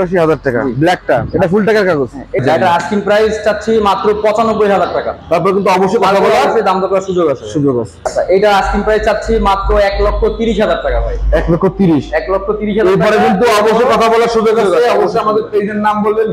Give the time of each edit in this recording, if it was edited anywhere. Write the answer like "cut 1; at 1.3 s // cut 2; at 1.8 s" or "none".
cut 1; at 2.4 s // cut 2; at 8.1 s